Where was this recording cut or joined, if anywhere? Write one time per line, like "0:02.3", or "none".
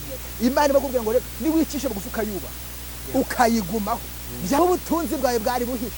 0:04.6